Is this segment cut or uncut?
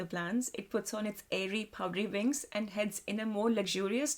uncut